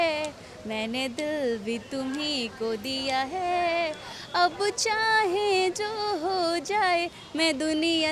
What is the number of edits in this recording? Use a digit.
0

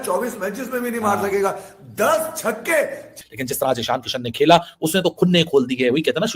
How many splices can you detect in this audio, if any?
1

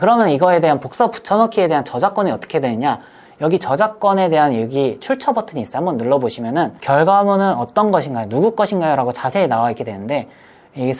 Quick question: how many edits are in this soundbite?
1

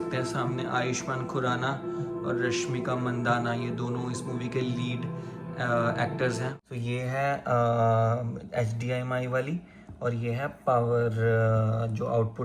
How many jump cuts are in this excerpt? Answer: 1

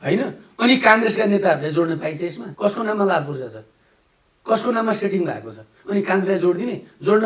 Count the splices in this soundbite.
1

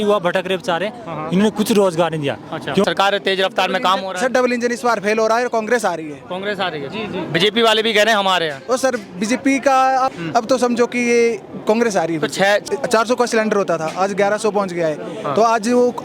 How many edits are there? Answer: 3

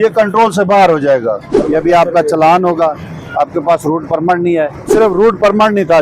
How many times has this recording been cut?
2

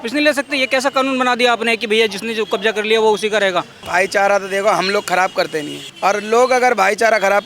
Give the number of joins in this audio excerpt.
2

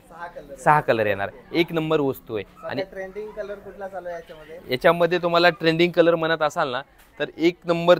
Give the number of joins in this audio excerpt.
0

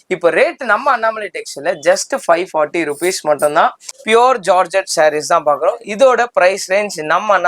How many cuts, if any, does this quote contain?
1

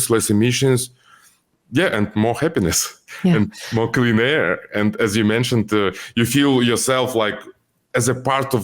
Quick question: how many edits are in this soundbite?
2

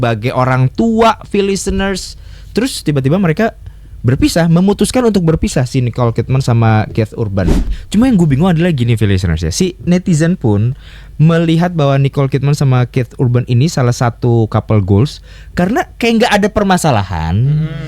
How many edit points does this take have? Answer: 1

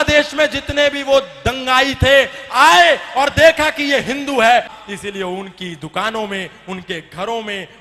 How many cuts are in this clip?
1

